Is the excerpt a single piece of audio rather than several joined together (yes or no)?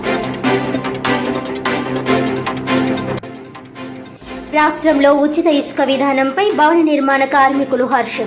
no